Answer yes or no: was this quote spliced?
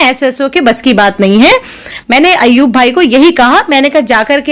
no